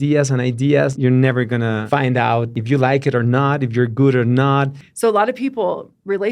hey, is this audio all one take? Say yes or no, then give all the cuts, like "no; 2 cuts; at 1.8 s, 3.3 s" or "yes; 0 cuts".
no; 4 cuts; at 0.9 s, 1.8 s, 2.6 s, 4.8 s